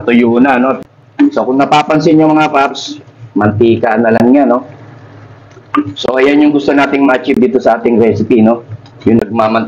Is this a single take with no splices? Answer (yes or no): no